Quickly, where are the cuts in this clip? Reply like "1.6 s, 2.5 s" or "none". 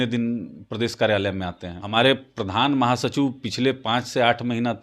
1.8 s

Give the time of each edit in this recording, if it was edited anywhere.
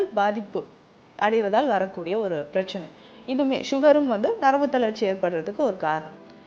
none

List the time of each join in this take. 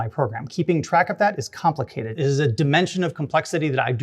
2.0 s

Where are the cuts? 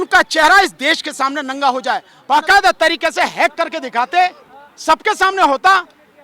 2.1 s

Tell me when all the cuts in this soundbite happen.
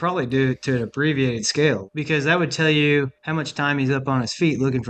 1.9 s, 3.2 s

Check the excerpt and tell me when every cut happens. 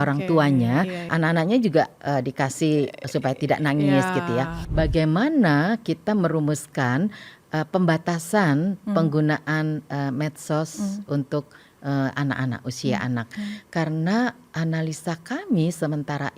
1.1 s, 4.6 s

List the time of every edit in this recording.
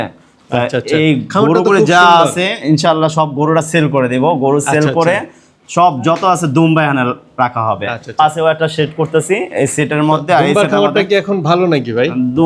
none

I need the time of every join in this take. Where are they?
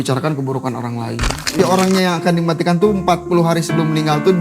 1.6 s

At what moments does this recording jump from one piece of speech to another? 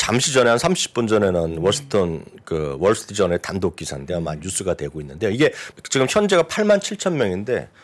5.6 s

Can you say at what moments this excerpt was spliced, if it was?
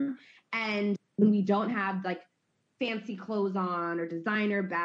1.0 s

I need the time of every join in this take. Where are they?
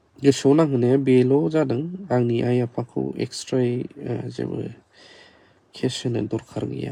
none

